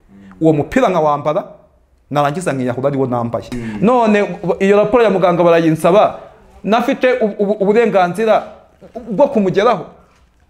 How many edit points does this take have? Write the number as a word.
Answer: one